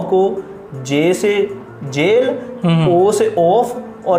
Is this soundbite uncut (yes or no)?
yes